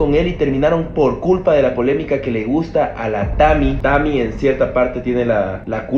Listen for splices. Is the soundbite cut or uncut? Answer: cut